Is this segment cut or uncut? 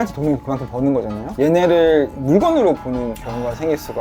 cut